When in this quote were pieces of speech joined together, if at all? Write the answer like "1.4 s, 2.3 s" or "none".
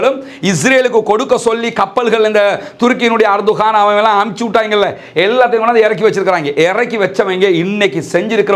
none

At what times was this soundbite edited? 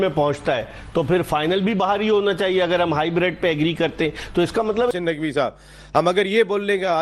4.9 s

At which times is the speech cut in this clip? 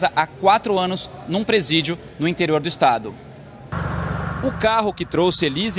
none

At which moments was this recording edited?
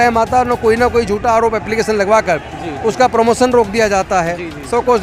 none

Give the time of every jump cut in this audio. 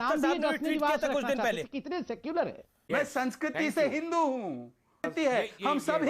2.8 s

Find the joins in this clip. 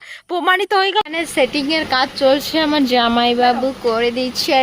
1.0 s

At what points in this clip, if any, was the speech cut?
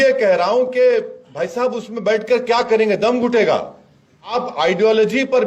4.3 s

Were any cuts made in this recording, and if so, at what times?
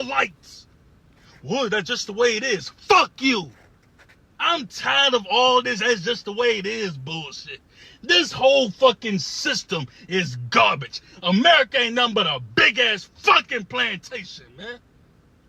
5.2 s

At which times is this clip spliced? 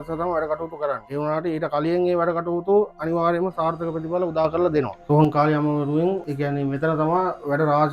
1.0 s, 5.0 s, 6.3 s

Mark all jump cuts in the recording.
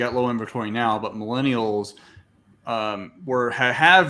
none

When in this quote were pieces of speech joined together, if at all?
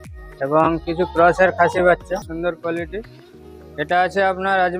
2.3 s

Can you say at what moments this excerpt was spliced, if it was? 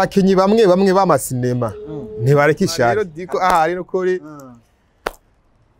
3.1 s

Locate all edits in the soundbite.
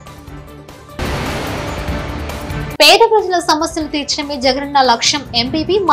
0.8 s, 2.7 s

